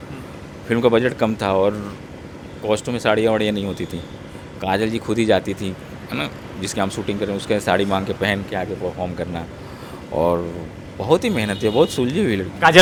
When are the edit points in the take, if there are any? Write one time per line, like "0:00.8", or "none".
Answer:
none